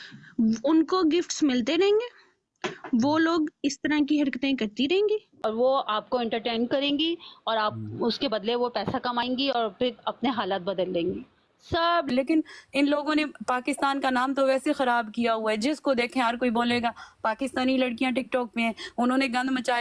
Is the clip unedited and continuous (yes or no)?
no